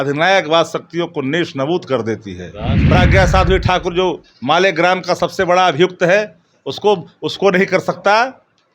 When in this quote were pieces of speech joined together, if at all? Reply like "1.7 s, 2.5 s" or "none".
2.7 s

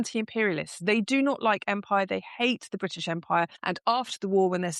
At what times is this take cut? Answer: 3.6 s

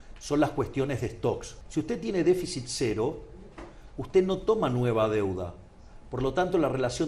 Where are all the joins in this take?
1.5 s

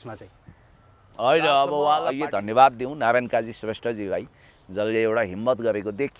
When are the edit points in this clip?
2.1 s

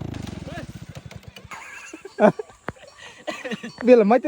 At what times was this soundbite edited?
1.5 s

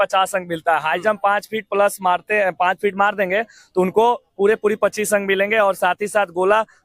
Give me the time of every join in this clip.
none

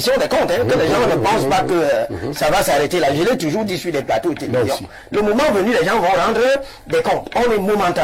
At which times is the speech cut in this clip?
none

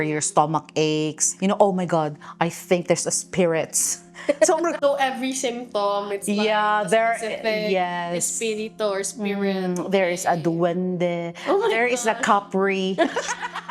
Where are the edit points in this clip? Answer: 1.2 s, 4.8 s

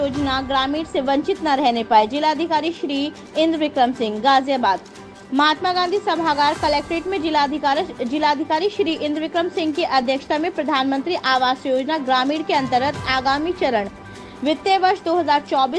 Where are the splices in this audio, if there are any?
none

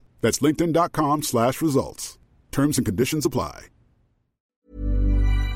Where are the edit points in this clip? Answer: 4.6 s

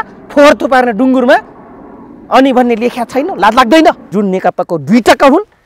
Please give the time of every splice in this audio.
4.0 s

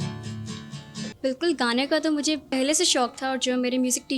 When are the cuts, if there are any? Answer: 1.2 s, 2.4 s

